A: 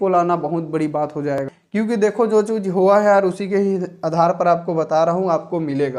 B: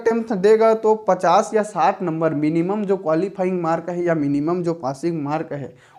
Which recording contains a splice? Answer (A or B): A